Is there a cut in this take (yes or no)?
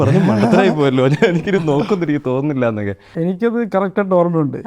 yes